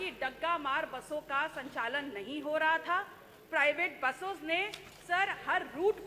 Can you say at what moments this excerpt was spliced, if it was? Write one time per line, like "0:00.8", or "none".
none